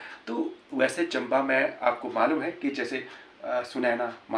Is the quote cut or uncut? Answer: uncut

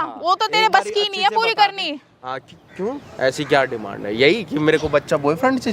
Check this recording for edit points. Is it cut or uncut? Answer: uncut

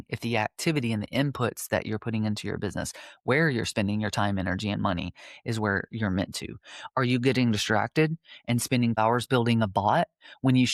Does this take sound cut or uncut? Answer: cut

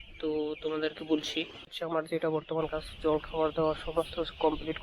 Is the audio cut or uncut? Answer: cut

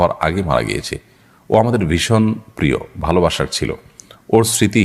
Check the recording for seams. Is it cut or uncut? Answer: uncut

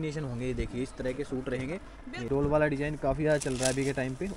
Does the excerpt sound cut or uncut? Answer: cut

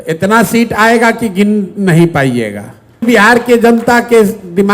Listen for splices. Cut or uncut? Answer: cut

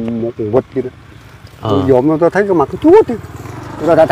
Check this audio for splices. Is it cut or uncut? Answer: uncut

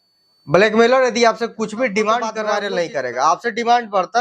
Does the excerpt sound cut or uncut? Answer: cut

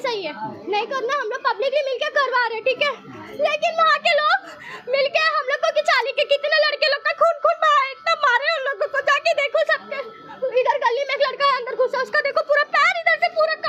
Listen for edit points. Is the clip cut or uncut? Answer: uncut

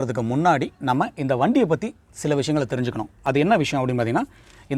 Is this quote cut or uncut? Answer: uncut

